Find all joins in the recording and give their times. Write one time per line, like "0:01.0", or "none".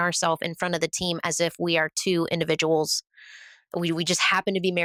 none

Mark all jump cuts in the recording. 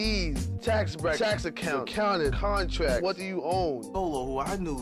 none

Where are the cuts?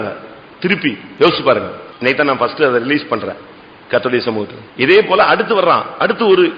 0:01.0
0:01.8
0:04.6

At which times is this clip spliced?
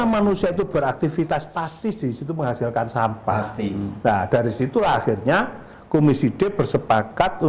none

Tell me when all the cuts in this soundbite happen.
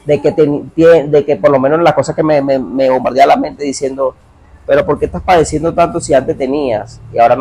none

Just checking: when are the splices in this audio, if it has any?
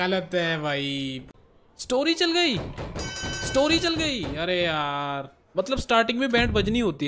0:01.3
0:05.4

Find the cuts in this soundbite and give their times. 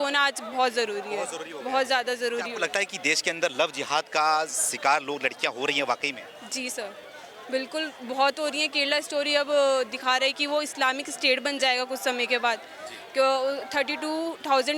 none

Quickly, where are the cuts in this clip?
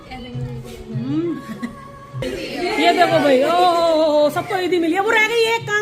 0:02.1

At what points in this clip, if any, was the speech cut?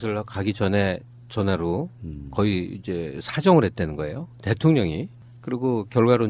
0:03.7

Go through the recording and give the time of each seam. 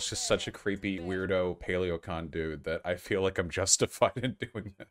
0:01.0

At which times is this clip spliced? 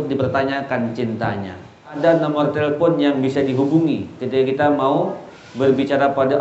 0:01.9

